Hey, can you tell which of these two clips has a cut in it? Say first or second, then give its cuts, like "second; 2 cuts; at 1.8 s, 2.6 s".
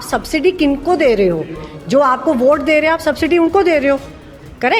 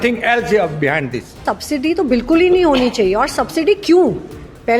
second; 1 cut; at 1.4 s